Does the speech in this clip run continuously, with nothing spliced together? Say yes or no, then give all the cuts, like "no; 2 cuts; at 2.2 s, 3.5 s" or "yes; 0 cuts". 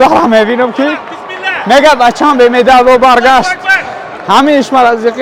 yes; 0 cuts